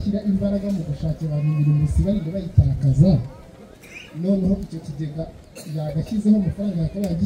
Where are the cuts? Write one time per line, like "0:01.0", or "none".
none